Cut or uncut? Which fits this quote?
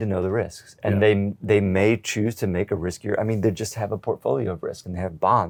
uncut